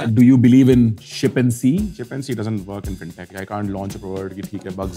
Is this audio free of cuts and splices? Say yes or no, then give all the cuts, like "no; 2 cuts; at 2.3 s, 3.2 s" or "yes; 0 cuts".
no; 3 cuts; at 1.1 s, 2.0 s, 3.3 s